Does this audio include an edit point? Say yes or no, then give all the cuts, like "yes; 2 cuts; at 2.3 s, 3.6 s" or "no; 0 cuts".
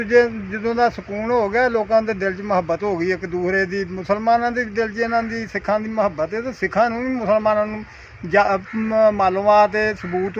no; 0 cuts